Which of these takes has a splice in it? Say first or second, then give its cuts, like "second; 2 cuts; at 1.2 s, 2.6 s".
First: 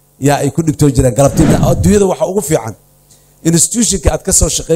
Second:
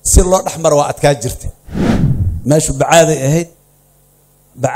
first; 1 cut; at 1.5 s